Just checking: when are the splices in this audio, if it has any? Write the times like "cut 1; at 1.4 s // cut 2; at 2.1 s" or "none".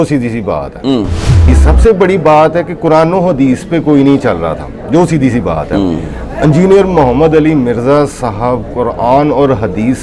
cut 1; at 1.5 s